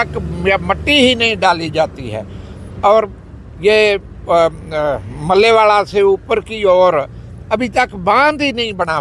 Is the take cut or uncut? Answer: uncut